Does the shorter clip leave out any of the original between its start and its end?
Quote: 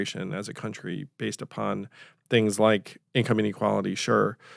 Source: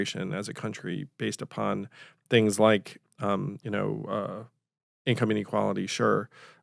yes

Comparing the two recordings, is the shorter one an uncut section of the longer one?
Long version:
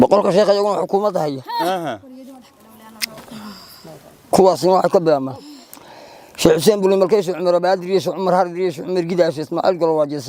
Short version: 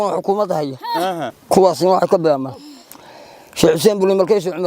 no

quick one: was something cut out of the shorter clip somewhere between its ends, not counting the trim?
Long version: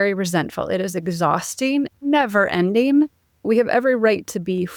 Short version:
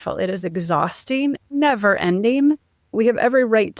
no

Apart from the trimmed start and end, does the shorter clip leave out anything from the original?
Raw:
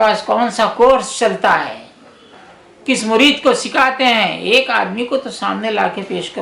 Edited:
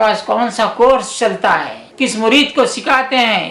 yes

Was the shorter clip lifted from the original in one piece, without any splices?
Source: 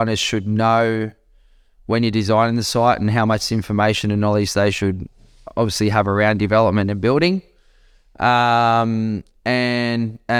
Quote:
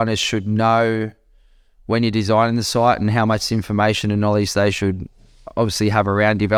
yes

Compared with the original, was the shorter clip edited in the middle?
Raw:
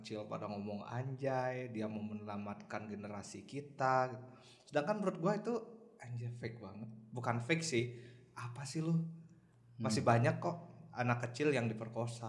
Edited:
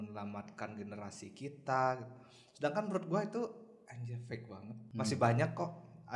yes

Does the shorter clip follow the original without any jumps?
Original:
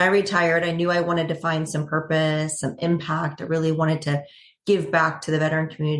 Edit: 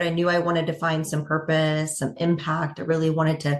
yes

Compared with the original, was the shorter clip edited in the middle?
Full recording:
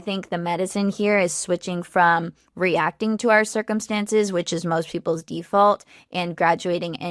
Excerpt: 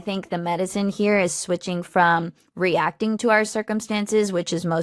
no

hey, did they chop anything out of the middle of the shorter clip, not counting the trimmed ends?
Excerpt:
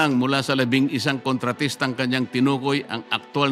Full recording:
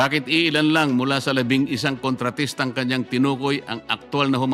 no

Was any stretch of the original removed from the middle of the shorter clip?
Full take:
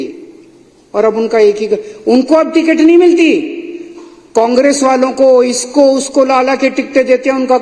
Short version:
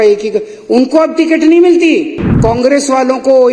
yes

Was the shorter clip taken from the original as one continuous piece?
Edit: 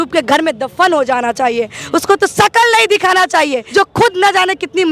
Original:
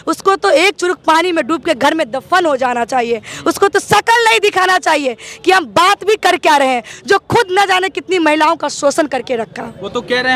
no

